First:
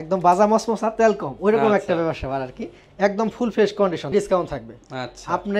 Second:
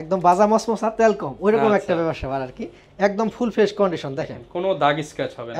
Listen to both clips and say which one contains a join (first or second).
first